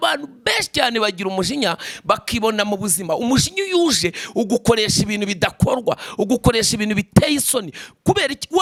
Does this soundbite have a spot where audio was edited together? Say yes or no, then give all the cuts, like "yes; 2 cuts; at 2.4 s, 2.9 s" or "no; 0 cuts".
no; 0 cuts